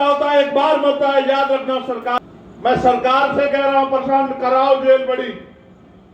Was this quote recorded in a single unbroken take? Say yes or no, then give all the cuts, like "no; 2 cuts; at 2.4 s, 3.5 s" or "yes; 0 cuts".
no; 1 cut; at 2.2 s